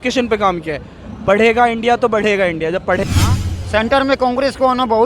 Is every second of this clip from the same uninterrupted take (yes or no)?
no